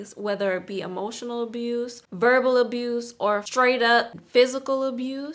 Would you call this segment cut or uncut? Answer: cut